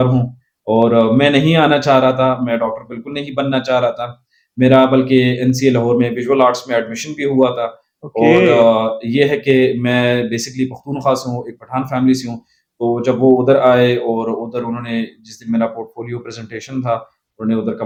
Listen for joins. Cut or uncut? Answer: uncut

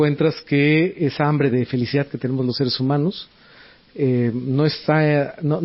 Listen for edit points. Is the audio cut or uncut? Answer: uncut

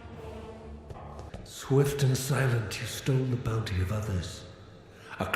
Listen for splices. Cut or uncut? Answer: cut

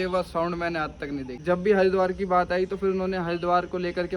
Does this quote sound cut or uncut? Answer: cut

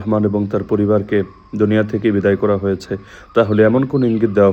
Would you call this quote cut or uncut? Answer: uncut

